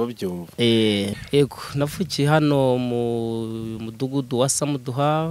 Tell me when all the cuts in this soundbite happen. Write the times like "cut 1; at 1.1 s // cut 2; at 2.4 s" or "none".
cut 1; at 1.1 s